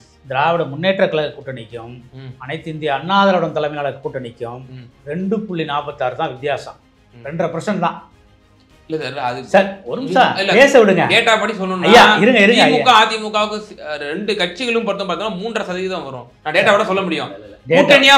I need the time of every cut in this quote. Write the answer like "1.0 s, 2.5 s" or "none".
none

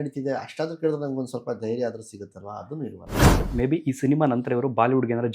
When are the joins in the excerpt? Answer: 3.5 s

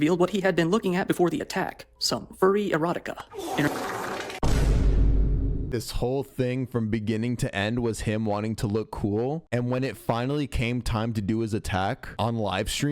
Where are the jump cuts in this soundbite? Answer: none

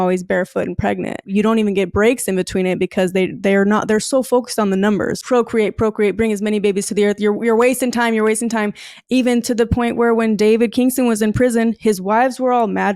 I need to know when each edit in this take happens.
1.3 s, 5.2 s

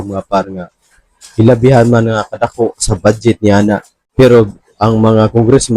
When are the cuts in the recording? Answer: 4.0 s

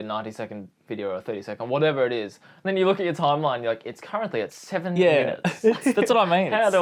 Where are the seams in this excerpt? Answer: none

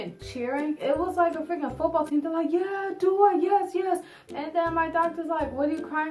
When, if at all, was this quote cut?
4.2 s

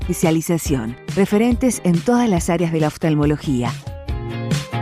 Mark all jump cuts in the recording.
3.7 s

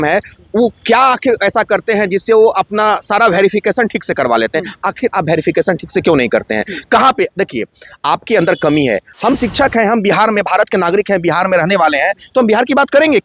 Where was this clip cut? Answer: 9.1 s

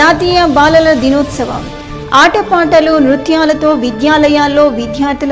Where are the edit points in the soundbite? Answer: none

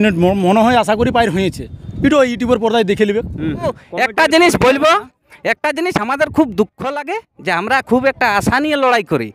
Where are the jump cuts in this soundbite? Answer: 3.8 s

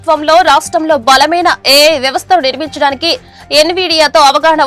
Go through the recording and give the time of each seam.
none

